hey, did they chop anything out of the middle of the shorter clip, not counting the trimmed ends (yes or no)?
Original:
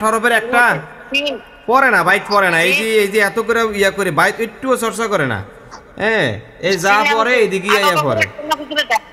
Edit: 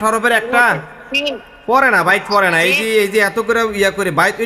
no